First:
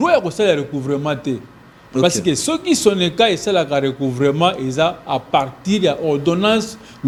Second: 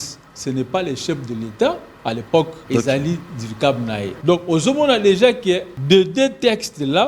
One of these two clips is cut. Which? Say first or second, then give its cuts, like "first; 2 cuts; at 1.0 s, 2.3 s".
second; 3 cuts; at 2.6 s, 4.1 s, 5.7 s